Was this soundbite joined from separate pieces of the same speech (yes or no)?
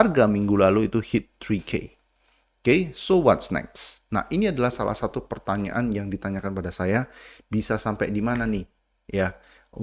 no